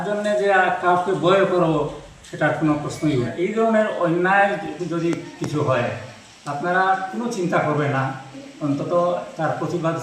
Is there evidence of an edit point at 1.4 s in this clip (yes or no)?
no